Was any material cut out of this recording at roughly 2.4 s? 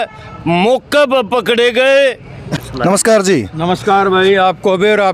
yes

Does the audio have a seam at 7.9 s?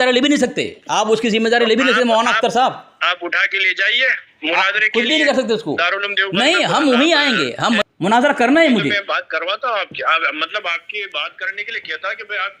yes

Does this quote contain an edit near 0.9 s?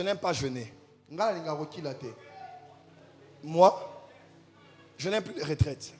no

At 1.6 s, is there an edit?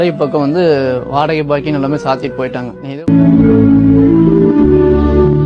no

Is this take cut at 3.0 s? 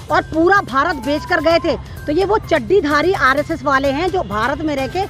no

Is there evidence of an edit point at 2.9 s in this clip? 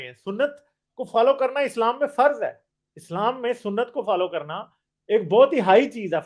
no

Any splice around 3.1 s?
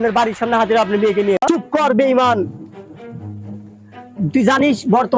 no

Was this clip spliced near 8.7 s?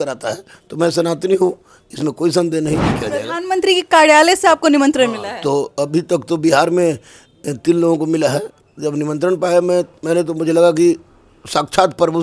yes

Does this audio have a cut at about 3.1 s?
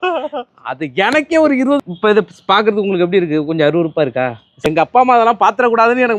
no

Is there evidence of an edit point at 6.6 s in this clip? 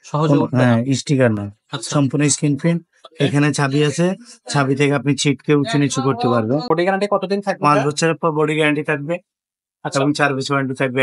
yes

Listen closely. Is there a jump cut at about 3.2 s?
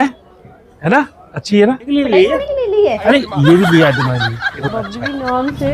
no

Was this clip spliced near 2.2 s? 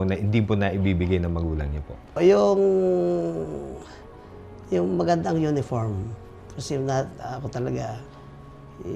yes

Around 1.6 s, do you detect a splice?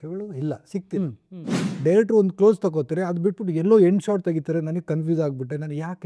yes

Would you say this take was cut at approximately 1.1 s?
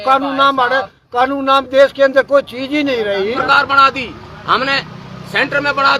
no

